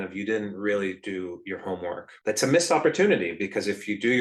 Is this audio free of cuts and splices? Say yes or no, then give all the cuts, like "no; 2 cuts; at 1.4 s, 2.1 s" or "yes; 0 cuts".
no; 1 cut; at 2.1 s